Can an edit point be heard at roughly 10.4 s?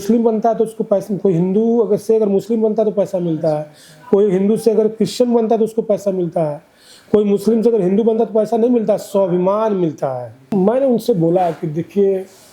yes; 1 cut; at 10.4 s

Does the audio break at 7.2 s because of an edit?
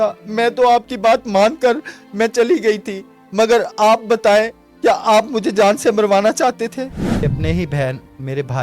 yes; 1 cut; at 7.2 s

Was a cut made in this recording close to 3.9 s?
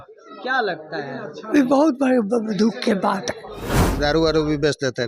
yes; 1 cut; at 3.9 s

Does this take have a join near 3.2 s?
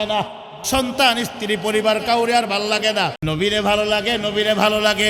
yes; 1 cut; at 3.2 s

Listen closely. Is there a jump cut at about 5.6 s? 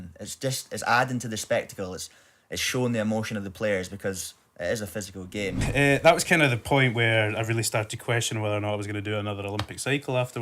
yes; 1 cut; at 5.6 s

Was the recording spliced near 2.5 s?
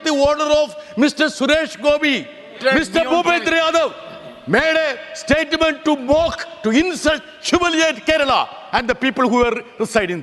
yes; 1 cut; at 2.5 s

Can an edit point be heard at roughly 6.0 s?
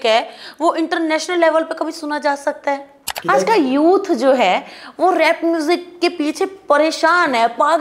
no; 1 cut; at 3.1 s

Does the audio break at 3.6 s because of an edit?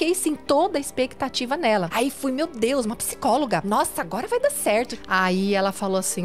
yes; 3 cuts; at 1.9 s, 3.6 s, 4.9 s

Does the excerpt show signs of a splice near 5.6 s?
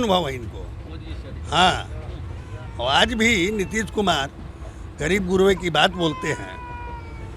no; 0 cuts

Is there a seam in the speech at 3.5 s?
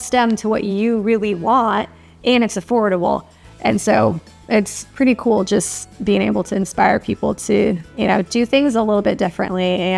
no; 0 cuts

